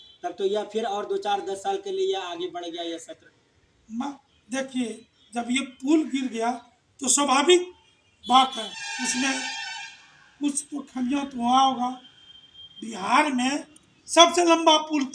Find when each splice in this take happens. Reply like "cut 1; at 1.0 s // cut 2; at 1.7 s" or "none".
cut 1; at 9.0 s